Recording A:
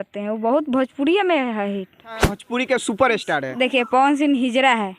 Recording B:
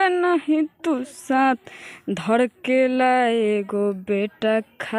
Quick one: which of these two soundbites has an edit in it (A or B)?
A